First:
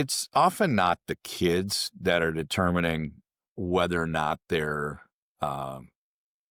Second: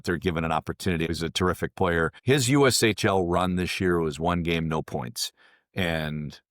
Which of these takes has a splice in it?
second; 2 cuts; at 1.1 s, 2.2 s

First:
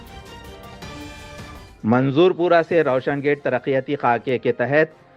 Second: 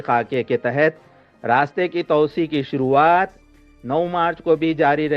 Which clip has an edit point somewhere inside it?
first; 1 cut; at 1.7 s

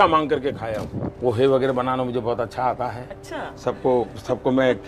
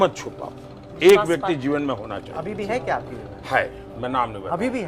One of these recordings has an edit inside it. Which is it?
first; 1 cut; at 1.1 s

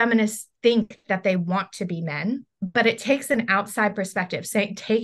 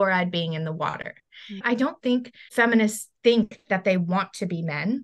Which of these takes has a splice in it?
second; 1 cut; at 1.6 s

